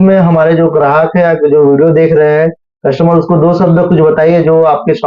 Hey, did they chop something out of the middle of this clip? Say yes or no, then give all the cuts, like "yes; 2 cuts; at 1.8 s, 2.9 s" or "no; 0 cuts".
no; 0 cuts